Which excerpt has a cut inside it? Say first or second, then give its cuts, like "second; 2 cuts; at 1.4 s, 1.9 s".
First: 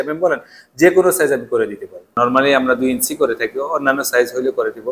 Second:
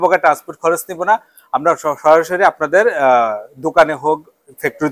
first; 1 cut; at 2.1 s